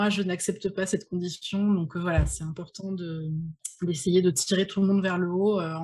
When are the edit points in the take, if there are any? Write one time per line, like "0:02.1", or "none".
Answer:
0:03.6